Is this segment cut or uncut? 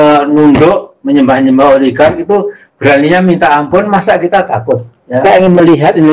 cut